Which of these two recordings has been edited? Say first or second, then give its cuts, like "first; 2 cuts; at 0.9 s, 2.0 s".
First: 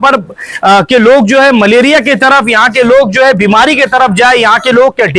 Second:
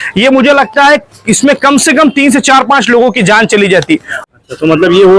second; 1 cut; at 4.2 s